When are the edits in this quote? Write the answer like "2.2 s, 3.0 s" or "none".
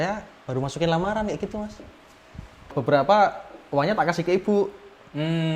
2.7 s